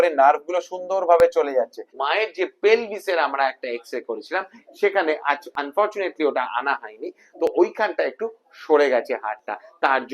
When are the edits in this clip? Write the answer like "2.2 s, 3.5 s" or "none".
1.9 s